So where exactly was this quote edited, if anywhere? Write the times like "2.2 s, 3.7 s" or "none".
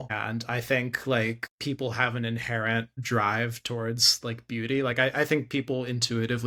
none